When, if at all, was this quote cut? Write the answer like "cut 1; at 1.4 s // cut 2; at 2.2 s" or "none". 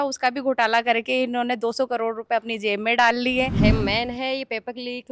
cut 1; at 3.6 s